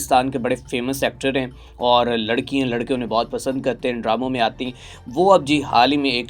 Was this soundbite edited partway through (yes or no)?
no